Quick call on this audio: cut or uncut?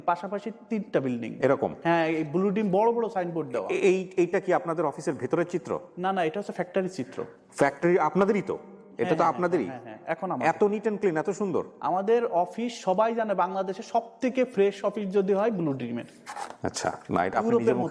uncut